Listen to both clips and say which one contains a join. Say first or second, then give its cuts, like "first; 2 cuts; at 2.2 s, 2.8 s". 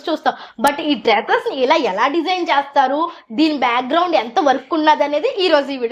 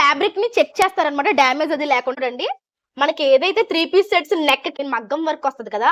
second; 2 cuts; at 2.2 s, 4.7 s